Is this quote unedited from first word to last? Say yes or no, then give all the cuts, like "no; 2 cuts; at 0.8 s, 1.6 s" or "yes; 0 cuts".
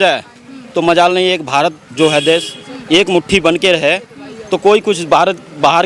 yes; 0 cuts